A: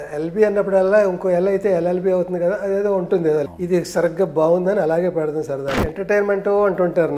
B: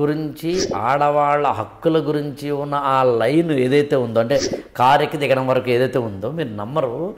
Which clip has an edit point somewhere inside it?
A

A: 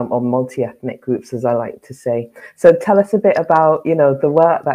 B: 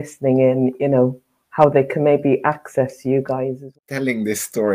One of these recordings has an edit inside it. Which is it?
B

